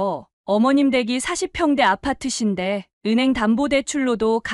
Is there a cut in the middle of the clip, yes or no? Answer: no